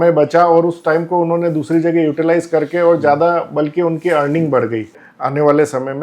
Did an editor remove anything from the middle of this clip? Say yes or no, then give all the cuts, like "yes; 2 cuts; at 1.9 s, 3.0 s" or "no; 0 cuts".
yes; 1 cut; at 5.1 s